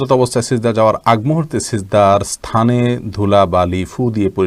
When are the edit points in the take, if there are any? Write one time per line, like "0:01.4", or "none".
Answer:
none